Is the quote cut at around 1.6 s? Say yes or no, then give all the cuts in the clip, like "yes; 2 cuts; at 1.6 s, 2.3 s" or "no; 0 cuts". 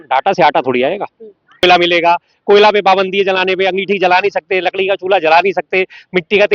yes; 1 cut; at 1.6 s